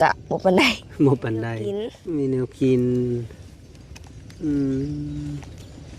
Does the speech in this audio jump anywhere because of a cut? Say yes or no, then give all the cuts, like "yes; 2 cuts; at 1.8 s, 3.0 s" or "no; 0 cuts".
yes; 1 cut; at 1.9 s